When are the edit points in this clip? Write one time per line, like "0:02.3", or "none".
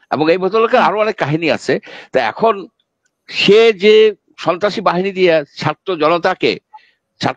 none